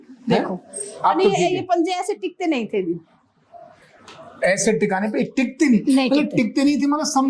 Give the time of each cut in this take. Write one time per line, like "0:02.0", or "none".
none